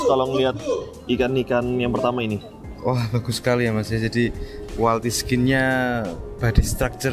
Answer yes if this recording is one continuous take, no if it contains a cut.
yes